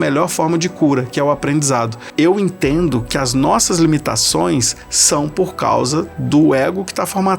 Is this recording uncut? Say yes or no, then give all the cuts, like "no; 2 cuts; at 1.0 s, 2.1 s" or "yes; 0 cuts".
no; 1 cut; at 2.0 s